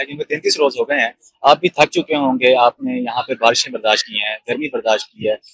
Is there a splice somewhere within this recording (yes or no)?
no